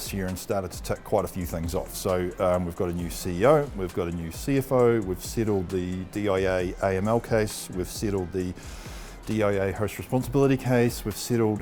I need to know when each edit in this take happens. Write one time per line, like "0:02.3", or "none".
none